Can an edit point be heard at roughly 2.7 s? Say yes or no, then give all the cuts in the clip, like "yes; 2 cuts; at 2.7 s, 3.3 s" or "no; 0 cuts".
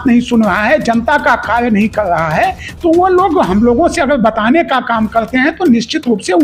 no; 0 cuts